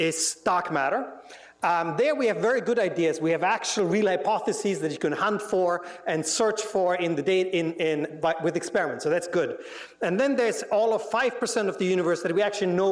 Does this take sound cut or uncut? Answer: cut